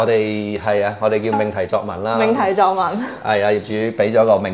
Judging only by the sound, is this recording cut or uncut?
uncut